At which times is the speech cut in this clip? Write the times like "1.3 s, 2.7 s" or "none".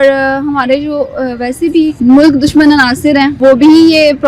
2.0 s, 3.3 s